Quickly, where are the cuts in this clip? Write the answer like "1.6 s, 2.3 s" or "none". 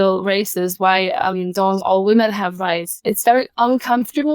2.9 s